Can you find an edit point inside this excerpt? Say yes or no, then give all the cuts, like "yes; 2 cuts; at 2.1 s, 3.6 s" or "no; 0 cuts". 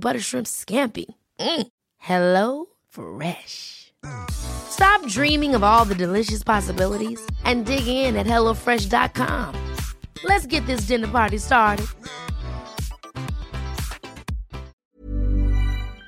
yes; 1 cut; at 15.0 s